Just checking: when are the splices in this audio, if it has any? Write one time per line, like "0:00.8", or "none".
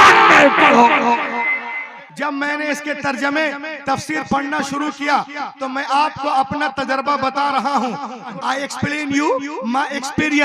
0:02.0
0:08.3